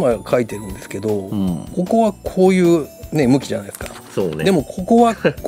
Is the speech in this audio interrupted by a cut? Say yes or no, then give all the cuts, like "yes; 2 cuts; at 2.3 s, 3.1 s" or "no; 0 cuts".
no; 0 cuts